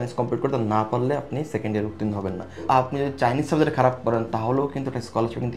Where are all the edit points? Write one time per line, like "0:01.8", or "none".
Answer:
0:02.5